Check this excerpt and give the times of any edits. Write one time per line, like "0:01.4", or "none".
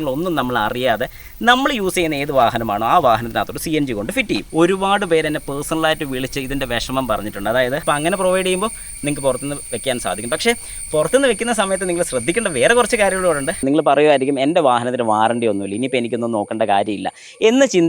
0:04.5
0:07.8
0:13.6